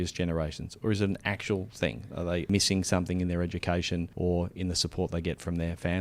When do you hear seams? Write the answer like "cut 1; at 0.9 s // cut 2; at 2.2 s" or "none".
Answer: cut 1; at 2.5 s // cut 2; at 4.1 s